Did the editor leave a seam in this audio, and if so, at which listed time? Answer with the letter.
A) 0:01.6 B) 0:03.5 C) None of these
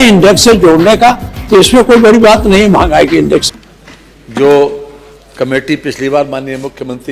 B